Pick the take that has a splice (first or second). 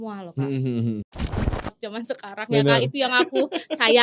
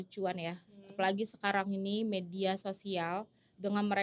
first